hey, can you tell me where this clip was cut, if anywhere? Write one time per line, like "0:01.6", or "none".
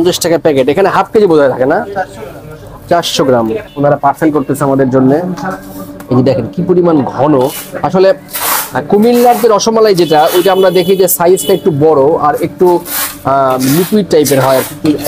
0:03.6